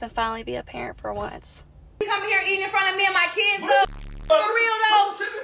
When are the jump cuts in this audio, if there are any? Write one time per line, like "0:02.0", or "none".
0:01.9